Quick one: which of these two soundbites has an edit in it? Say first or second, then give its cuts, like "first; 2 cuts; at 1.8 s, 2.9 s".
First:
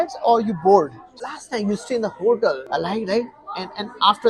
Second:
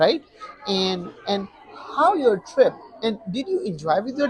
first; 2 cuts; at 1.2 s, 2.6 s